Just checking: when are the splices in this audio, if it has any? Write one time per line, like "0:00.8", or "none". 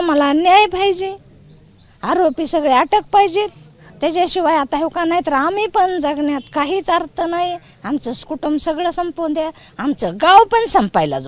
none